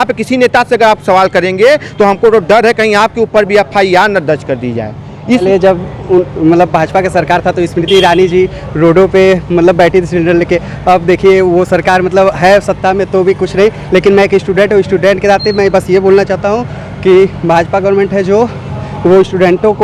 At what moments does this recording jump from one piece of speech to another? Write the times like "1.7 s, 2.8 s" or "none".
5.4 s